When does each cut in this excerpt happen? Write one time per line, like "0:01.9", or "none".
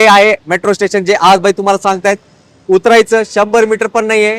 none